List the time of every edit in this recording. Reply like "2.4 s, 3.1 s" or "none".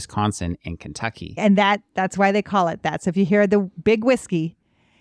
1.4 s